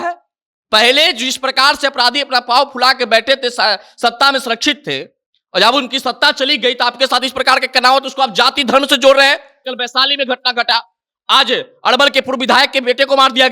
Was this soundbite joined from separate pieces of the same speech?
yes; 1 cut; at 9.7 s

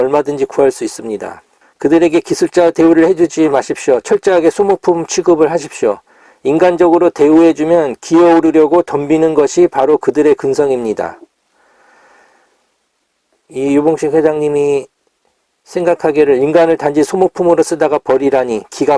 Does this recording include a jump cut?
no; 0 cuts

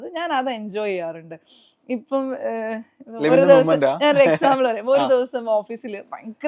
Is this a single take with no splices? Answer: yes; 0 cuts

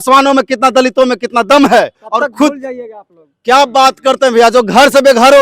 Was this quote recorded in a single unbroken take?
no; 1 cut; at 1.9 s

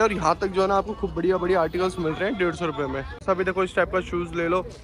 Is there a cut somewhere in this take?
yes; 1 cut; at 3.2 s

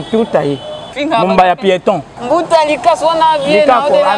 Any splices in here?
yes; 2 cuts; at 1.0 s, 2.1 s

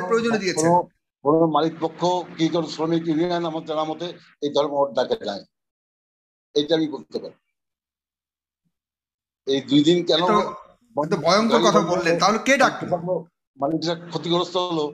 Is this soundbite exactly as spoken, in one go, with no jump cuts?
yes; 0 cuts

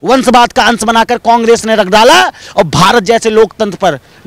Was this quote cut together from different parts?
no; 0 cuts

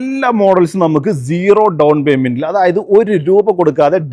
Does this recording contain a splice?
no; 0 cuts

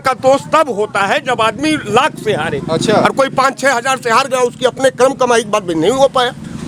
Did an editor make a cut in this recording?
no; 0 cuts

